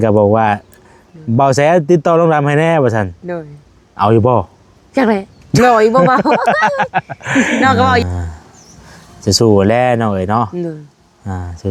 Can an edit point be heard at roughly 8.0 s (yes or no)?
yes